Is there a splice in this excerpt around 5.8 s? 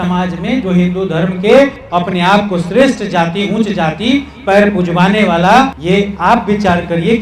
yes; 1 cut; at 5.8 s

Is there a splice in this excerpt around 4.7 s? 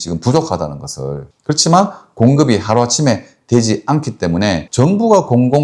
yes; 1 cut; at 4.7 s

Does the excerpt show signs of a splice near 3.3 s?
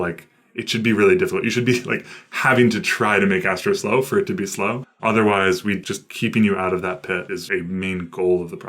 no; 3 cuts; at 4.9 s, 5.8 s, 7.4 s

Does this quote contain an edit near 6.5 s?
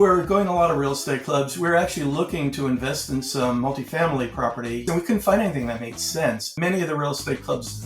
yes; 2 cuts; at 4.9 s, 6.5 s

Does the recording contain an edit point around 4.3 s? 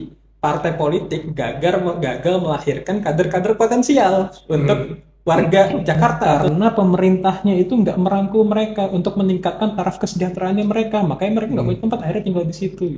no; 1 cut; at 6.2 s

